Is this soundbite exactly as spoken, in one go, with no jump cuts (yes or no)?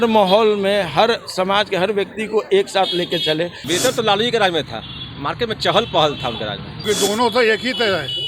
no